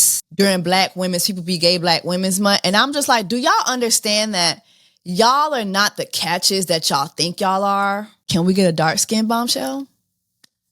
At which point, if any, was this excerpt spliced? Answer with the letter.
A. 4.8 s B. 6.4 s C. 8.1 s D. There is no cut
C